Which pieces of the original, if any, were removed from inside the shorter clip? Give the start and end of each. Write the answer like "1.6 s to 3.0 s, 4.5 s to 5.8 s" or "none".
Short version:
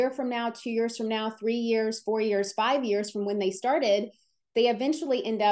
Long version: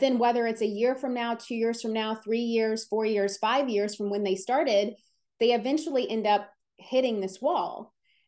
none